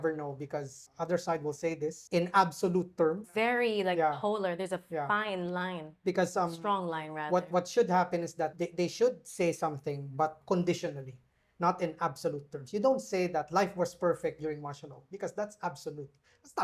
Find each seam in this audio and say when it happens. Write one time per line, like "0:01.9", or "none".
0:00.8
0:02.0
0:03.2
0:08.5
0:10.4